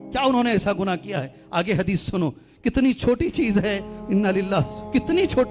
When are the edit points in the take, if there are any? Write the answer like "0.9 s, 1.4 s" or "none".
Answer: none